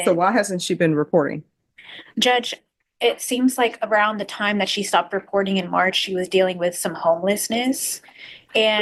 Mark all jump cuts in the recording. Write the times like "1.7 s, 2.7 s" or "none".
none